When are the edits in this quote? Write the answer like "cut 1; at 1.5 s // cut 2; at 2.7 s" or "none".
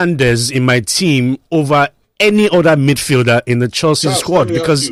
none